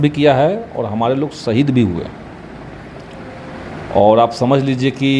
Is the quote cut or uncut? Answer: uncut